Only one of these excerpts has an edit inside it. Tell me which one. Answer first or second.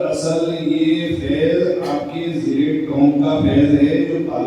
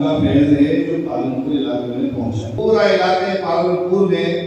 second